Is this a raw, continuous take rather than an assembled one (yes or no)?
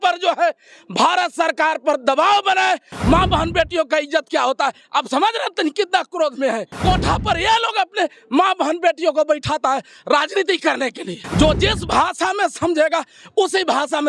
no